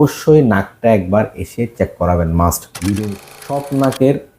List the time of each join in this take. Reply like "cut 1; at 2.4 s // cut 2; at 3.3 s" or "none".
cut 1; at 3.2 s